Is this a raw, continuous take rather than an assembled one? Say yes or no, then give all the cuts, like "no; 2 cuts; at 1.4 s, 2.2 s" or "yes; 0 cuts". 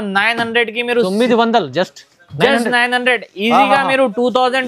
yes; 0 cuts